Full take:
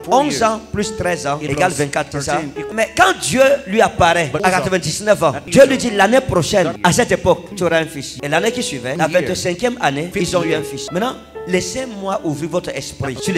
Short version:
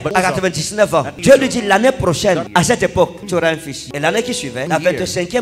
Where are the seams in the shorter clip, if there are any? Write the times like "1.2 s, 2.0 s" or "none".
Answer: none